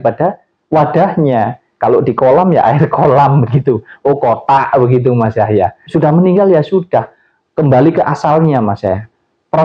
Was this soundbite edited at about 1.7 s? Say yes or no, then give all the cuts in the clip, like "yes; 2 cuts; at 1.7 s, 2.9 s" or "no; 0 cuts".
no; 1 cut; at 5.8 s